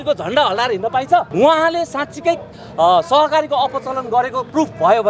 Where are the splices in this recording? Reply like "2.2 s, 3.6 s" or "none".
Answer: 1.3 s